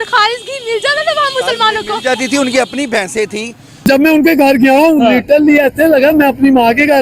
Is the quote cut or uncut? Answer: cut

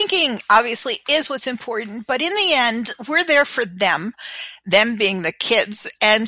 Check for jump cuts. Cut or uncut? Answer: uncut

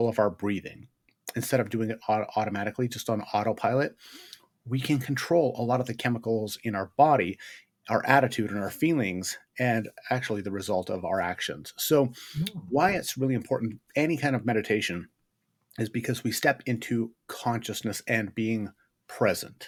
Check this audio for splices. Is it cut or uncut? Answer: uncut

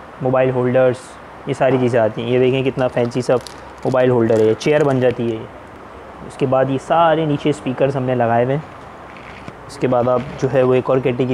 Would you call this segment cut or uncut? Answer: uncut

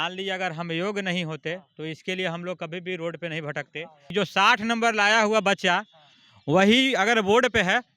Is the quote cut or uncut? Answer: cut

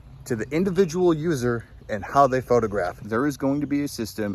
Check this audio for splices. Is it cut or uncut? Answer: cut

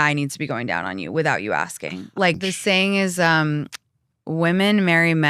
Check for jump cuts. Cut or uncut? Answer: cut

